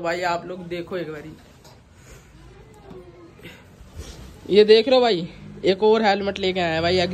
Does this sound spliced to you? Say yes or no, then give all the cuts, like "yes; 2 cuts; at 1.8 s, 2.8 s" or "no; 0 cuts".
no; 0 cuts